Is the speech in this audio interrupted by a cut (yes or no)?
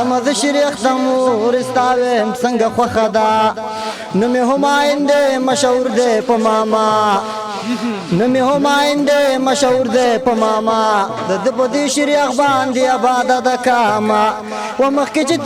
no